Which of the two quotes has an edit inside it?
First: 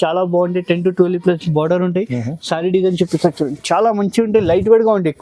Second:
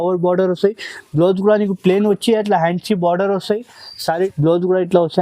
second; 1 cut; at 4.3 s

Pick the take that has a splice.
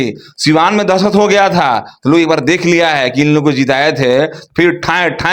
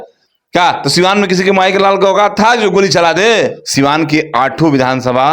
second; 1 cut; at 3.6 s

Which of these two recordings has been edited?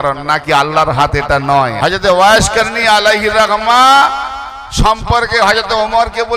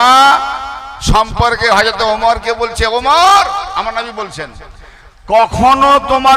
first; 1 cut; at 1.7 s

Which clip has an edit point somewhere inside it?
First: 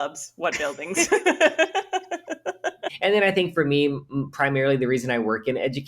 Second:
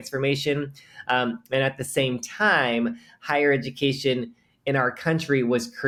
first; 1 cut; at 2.9 s

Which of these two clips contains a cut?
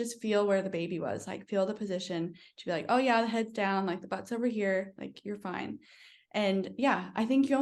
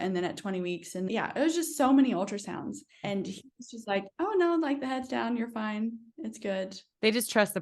second; 2 cuts; at 1.1 s, 3.0 s

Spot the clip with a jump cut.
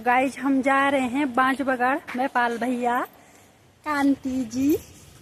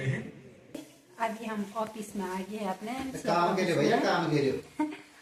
second; 1 cut; at 1.0 s

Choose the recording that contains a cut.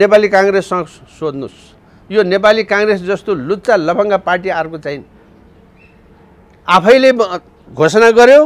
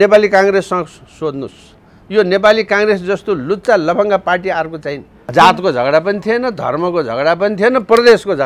second; 1 cut; at 5.2 s

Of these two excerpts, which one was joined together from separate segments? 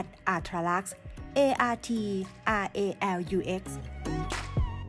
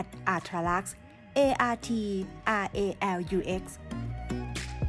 second; 1 cut; at 3.7 s

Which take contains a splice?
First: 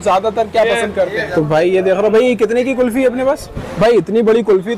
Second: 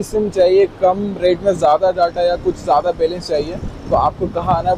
first; 2 cuts; at 1.2 s, 3.6 s

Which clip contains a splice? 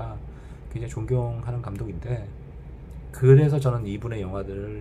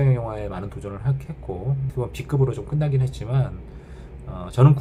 second; 1 cut; at 1.9 s

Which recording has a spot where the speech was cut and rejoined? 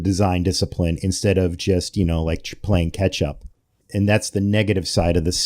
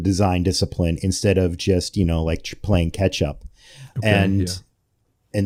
first; 1 cut; at 3.8 s

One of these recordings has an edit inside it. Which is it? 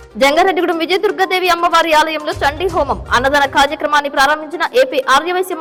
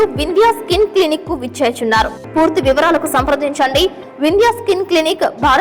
second; 1 cut; at 2.2 s

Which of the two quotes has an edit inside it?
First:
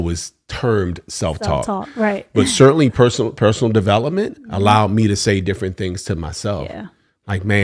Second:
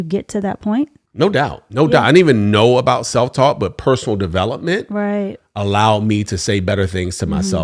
second; 1 cut; at 1.0 s

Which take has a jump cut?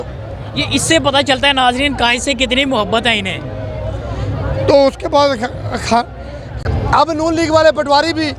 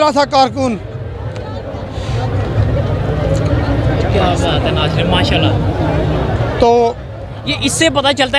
first; 1 cut; at 6.6 s

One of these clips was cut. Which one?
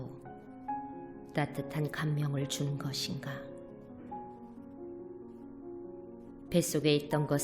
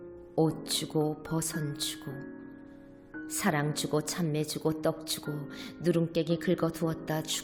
first; 2 cuts; at 3.9 s, 6.5 s

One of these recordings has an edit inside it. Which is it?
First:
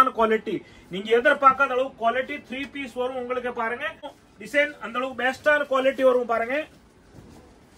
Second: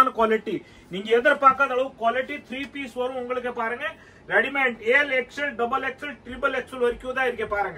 first; 1 cut; at 4.2 s

